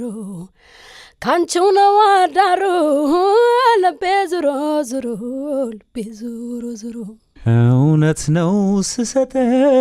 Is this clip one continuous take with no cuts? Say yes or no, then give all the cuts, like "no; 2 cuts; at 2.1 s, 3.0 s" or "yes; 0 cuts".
no; 1 cut; at 7.2 s